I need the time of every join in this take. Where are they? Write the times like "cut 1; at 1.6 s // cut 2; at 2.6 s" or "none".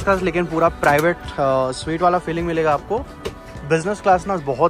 none